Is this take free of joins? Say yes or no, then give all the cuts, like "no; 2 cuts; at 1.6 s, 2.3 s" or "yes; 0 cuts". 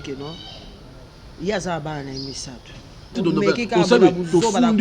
no; 1 cut; at 3.1 s